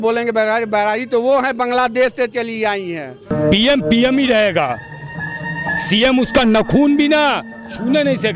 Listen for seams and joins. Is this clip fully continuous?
no; 1 cut; at 3.3 s

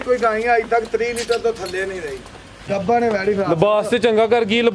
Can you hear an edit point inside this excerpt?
yes; 1 cut; at 2.6 s

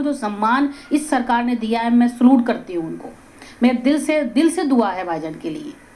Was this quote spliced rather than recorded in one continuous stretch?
no; 0 cuts

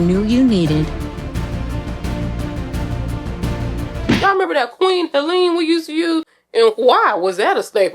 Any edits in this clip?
yes; 1 cut; at 4.2 s

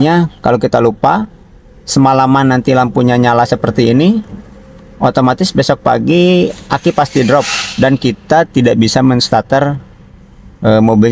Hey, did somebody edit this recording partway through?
no; 0 cuts

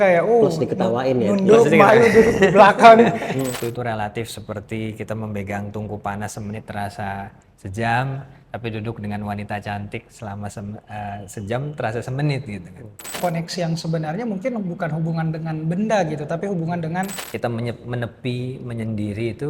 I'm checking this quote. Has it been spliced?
yes; 3 cuts; at 3.7 s, 13.2 s, 17.2 s

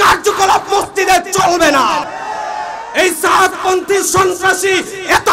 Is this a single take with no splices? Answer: no; 1 cut; at 2.1 s

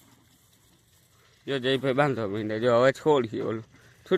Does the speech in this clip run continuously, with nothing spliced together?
yes; 0 cuts

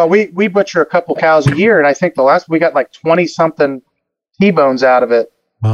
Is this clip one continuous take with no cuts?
yes; 0 cuts

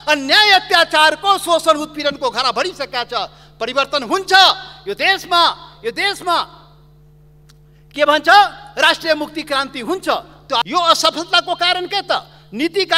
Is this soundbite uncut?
no; 1 cut; at 10.6 s

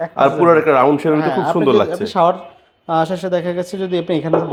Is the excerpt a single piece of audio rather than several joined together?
yes; 0 cuts

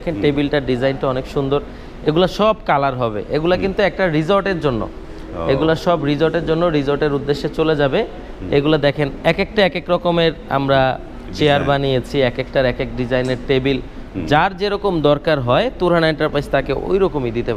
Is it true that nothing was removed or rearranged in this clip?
yes; 0 cuts

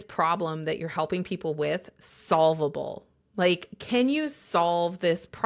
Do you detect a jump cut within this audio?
no; 0 cuts

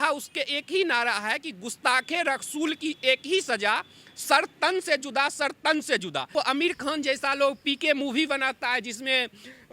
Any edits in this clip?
yes; 1 cut; at 6.3 s

